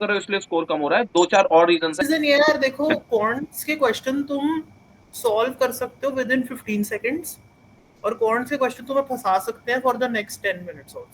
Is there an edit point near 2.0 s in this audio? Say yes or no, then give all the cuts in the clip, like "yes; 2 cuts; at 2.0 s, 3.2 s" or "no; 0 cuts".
yes; 1 cut; at 2.0 s